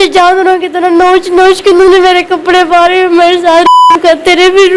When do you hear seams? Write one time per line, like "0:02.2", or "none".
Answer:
none